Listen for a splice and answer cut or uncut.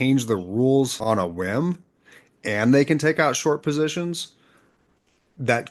cut